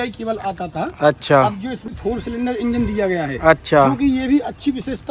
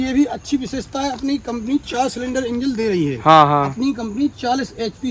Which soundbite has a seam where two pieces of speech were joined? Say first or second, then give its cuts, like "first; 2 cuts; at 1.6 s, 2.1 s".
first; 1 cut; at 1.9 s